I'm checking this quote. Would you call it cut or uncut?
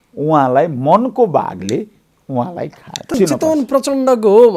cut